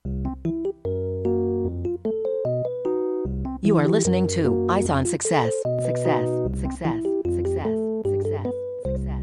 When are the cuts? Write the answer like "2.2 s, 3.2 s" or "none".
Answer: none